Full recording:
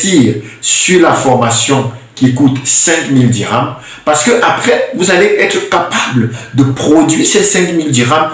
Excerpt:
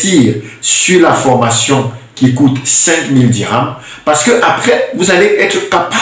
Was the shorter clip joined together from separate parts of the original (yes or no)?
no